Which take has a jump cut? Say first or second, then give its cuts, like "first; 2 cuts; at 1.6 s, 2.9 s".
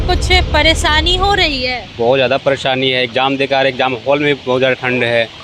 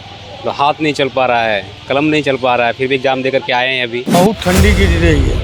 second; 1 cut; at 4.1 s